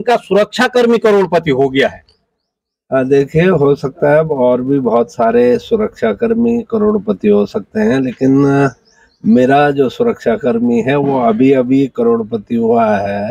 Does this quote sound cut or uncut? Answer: uncut